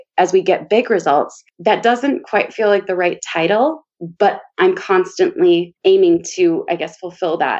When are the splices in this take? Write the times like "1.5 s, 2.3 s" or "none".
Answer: none